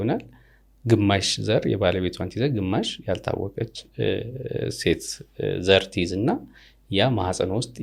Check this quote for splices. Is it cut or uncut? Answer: uncut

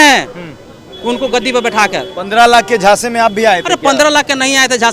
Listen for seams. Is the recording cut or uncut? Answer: uncut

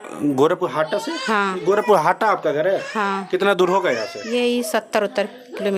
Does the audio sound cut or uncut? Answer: uncut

